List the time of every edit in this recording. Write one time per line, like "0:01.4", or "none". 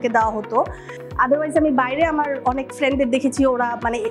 none